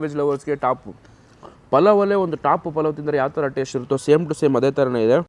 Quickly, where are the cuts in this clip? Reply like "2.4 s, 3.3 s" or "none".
none

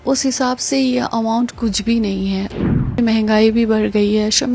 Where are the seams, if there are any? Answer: 3.0 s

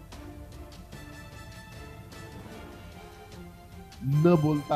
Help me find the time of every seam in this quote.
3.5 s

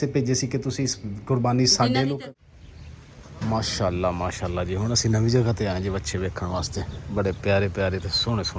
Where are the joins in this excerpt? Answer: 2.2 s

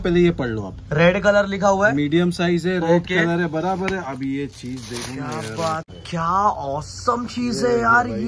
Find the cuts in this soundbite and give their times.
5.9 s

